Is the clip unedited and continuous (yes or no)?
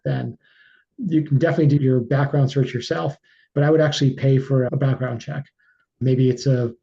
no